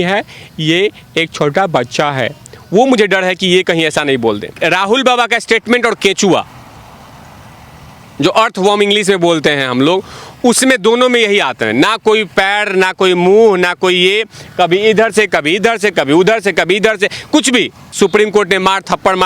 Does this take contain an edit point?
yes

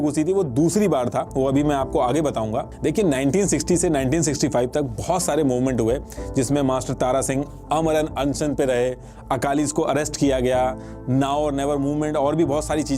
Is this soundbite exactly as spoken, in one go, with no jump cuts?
yes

